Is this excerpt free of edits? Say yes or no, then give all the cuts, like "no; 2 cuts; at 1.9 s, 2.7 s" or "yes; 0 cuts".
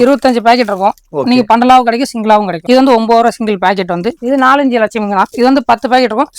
no; 2 cuts; at 2.5 s, 4.2 s